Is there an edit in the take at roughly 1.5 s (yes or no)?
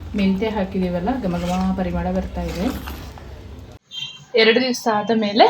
no